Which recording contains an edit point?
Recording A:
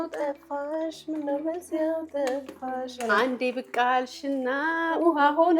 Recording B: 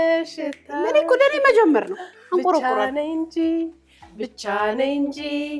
A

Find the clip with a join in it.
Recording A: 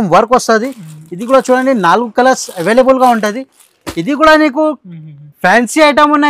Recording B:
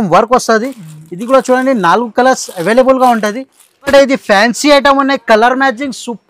B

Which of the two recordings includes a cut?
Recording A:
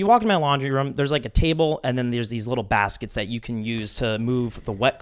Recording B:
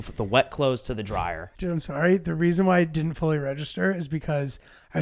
B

